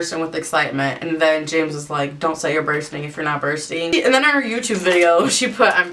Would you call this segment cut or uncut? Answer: uncut